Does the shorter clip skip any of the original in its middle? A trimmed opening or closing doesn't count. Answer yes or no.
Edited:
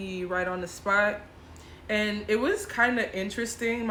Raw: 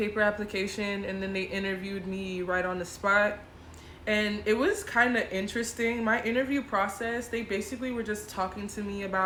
no